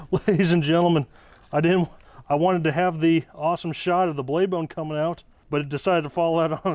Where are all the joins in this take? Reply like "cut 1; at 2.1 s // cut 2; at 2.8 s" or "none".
cut 1; at 5.3 s